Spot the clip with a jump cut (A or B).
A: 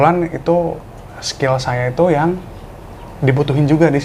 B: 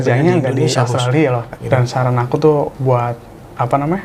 B